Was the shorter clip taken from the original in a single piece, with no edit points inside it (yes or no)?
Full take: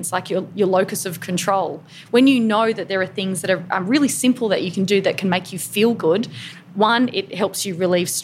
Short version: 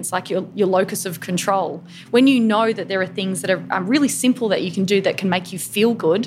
yes